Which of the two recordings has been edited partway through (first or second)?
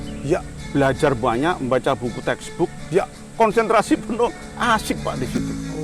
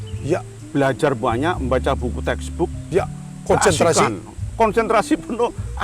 first